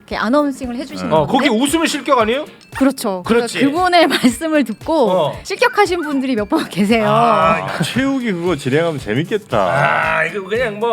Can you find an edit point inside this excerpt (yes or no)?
yes